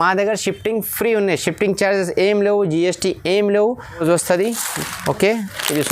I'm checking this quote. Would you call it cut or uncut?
cut